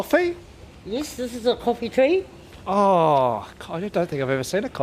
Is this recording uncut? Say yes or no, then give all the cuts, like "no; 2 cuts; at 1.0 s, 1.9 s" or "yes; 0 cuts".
yes; 0 cuts